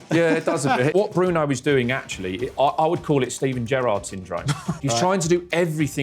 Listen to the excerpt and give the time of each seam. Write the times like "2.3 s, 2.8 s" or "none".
0.9 s, 4.7 s